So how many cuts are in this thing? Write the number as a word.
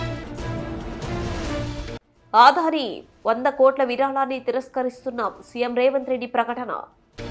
one